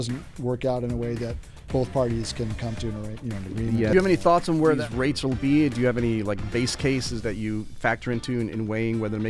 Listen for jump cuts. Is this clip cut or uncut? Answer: cut